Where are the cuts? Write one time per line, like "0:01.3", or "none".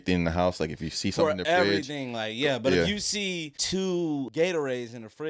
0:03.5
0:04.3